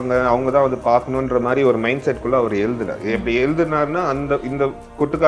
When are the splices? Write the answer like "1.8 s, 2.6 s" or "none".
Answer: none